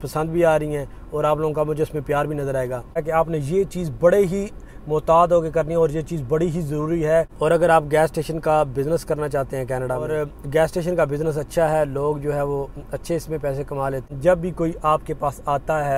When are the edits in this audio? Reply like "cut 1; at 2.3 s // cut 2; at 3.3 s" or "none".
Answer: cut 1; at 3.0 s // cut 2; at 7.3 s // cut 3; at 10.1 s // cut 4; at 14.1 s